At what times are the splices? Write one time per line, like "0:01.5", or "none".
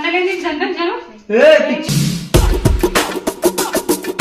0:01.8